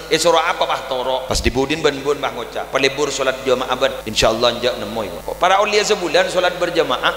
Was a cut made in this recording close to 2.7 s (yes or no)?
no